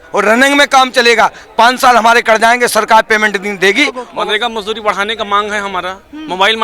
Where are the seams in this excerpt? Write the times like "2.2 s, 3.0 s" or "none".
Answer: 4.0 s